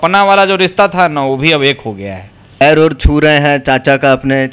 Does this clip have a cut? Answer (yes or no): yes